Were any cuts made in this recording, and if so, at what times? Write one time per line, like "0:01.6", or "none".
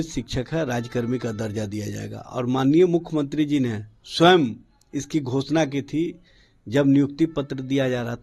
none